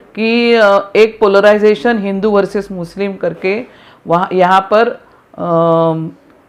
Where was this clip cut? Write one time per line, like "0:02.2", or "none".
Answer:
none